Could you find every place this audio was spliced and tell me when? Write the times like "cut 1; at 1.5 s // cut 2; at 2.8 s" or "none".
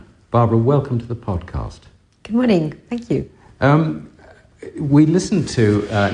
cut 1; at 4.0 s